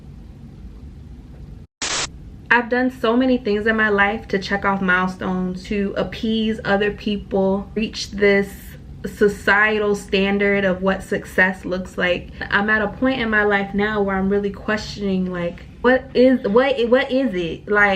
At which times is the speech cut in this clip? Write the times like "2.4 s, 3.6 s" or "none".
2.0 s, 5.6 s, 7.8 s, 12.5 s, 15.8 s